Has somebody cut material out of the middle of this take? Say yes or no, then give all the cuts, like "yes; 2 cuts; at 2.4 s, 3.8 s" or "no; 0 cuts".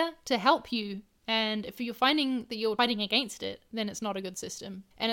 yes; 1 cut; at 2.8 s